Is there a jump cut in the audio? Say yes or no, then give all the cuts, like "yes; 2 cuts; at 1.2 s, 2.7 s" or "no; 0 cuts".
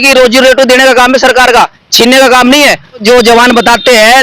yes; 1 cut; at 3.0 s